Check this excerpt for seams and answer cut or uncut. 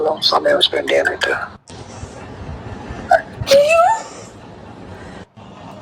uncut